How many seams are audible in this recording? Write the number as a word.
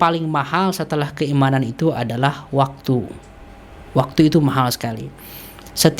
zero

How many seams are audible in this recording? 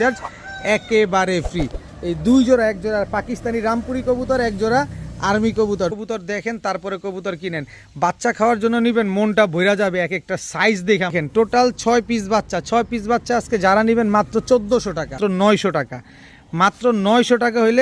three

